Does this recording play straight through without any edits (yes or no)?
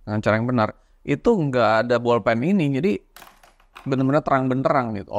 yes